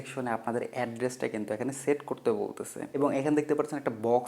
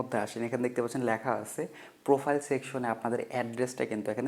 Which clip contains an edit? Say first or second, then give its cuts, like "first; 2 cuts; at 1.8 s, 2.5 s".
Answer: first; 1 cut; at 2.9 s